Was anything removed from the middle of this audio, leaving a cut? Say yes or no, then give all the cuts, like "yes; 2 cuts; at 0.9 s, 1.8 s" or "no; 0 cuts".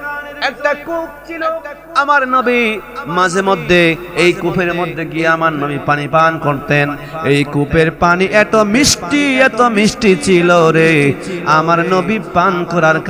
no; 0 cuts